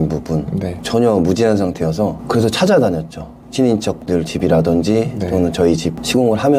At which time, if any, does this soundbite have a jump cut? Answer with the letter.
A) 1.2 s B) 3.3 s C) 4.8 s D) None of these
D